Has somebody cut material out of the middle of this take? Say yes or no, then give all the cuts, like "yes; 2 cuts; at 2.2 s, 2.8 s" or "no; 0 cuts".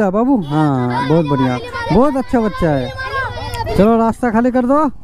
yes; 1 cut; at 3.7 s